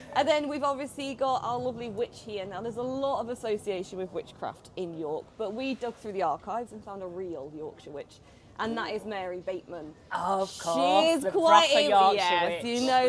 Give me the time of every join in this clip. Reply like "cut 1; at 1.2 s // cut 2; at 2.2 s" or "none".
none